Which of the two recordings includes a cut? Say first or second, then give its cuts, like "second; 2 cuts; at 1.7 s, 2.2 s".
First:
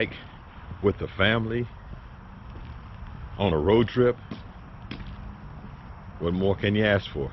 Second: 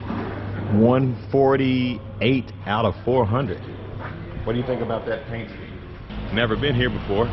second; 1 cut; at 6.1 s